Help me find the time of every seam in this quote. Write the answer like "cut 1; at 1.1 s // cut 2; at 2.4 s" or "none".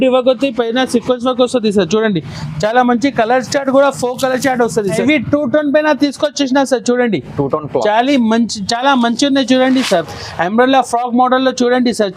cut 1; at 5.0 s